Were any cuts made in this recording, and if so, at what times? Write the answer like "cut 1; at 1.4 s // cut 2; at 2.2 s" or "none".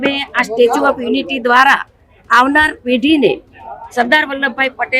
none

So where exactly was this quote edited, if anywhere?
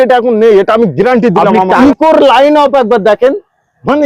cut 1; at 1.8 s

